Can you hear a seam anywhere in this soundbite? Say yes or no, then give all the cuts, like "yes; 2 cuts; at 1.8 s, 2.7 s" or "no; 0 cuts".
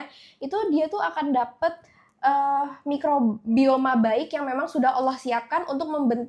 no; 0 cuts